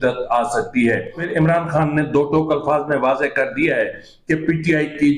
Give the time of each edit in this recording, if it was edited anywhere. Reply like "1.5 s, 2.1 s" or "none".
1.2 s